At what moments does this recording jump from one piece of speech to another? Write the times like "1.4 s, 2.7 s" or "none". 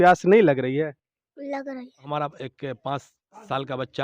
2.1 s